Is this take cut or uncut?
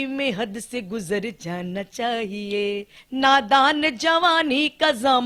cut